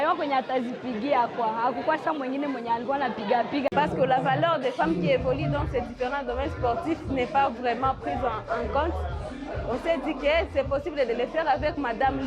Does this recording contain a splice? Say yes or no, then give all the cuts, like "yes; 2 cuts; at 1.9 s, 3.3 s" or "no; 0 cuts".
yes; 1 cut; at 3.7 s